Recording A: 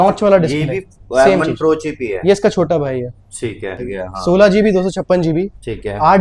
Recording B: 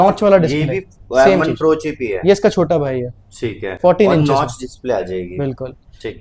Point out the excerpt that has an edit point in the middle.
A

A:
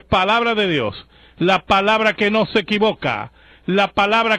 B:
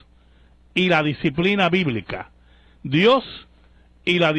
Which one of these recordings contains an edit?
B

